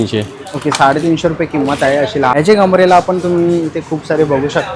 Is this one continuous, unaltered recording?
no; 1 cut; at 2.4 s

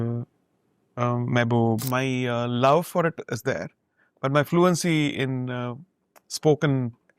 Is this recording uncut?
no; 1 cut; at 1.8 s

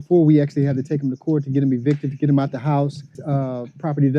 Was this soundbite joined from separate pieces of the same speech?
yes; 1 cut; at 3.2 s

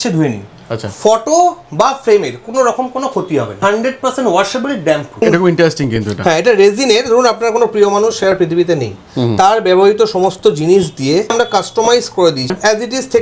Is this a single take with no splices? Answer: no; 4 cuts; at 3.6 s, 5.2 s, 11.3 s, 12.5 s

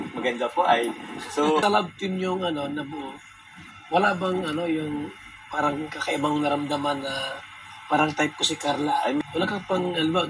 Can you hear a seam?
yes; 2 cuts; at 1.6 s, 9.2 s

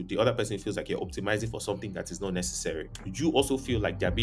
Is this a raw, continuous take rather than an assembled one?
no; 1 cut; at 3.0 s

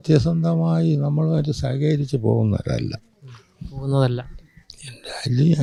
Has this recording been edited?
no; 0 cuts

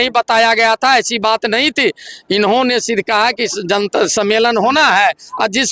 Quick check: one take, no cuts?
yes; 0 cuts

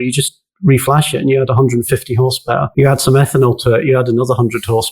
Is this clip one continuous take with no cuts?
no; 1 cut; at 2.7 s

